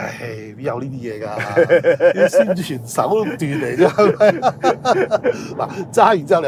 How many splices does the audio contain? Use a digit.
0